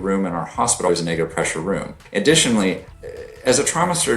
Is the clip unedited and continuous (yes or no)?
no